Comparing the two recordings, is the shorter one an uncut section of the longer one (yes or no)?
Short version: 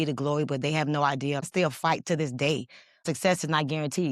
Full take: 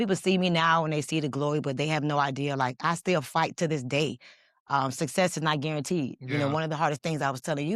no